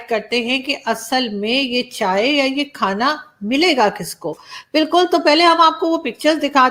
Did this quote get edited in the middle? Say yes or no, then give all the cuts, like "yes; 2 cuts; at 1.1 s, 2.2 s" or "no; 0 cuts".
no; 0 cuts